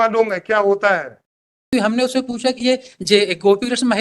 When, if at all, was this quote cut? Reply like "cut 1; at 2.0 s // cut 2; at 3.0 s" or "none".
cut 1; at 1.7 s